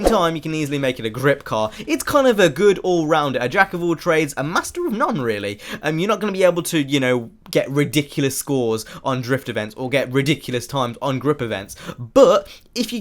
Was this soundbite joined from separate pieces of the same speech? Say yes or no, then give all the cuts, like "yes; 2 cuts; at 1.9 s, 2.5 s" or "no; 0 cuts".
yes; 1 cut; at 6.3 s